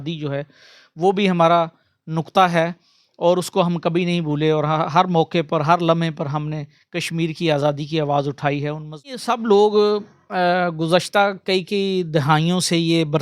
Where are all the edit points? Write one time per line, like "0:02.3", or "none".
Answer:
0:09.2